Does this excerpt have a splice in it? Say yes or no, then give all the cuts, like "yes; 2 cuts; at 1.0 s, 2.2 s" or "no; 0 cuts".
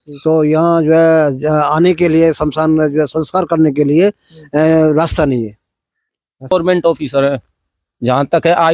yes; 1 cut; at 6.5 s